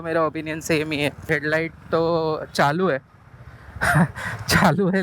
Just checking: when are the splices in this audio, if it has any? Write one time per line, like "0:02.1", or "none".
0:01.3